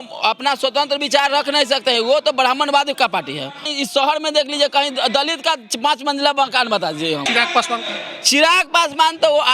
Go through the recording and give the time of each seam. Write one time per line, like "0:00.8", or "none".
0:03.7
0:07.3

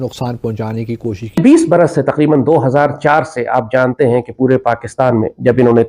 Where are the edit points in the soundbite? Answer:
0:01.4

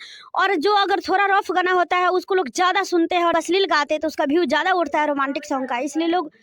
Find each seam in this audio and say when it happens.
0:03.3

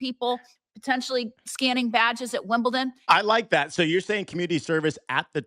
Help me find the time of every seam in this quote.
0:03.0

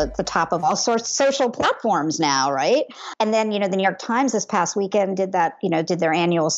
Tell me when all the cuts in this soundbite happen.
0:03.0

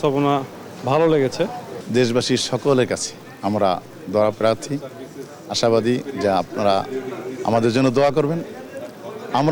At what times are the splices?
none

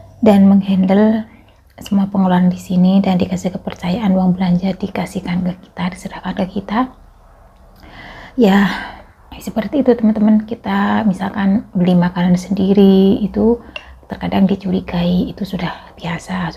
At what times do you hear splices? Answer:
none

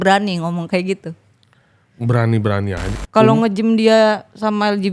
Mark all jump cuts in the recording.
0:02.9

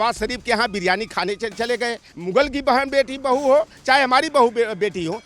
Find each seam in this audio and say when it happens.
0:02.1

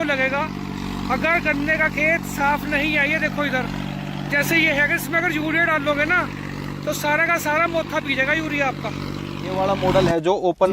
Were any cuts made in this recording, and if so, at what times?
0:09.6

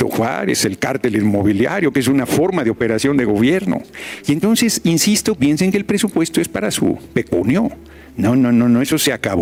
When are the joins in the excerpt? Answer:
none

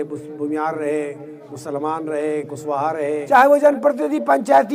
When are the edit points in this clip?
0:03.2

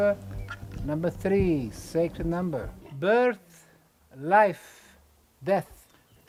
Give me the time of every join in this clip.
none

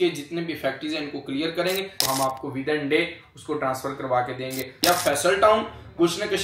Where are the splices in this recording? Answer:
0:02.0
0:04.7

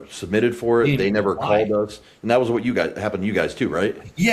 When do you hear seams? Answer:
none

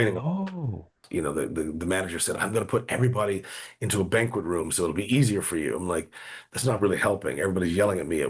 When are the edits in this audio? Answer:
0:01.0

